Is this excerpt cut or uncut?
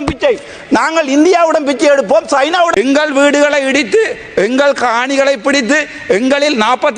cut